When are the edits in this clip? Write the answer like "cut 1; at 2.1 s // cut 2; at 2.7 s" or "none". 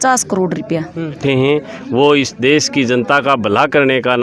cut 1; at 1.2 s